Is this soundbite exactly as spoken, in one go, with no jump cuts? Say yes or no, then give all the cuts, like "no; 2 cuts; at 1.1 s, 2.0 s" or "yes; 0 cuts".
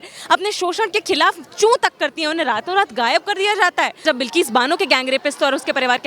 no; 1 cut; at 4.0 s